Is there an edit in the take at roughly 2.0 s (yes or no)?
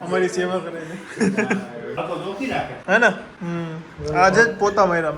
yes